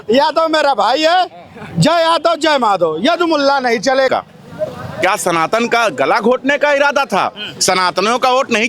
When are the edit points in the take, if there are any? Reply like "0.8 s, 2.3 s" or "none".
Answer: 4.1 s